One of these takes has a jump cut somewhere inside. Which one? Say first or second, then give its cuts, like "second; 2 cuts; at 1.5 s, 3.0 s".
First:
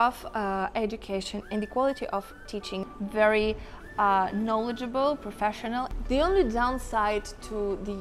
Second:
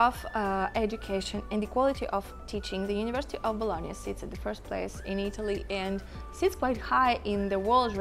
first; 2 cuts; at 2.8 s, 6.0 s